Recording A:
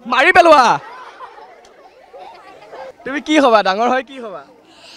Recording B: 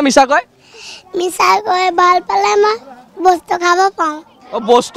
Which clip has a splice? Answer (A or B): A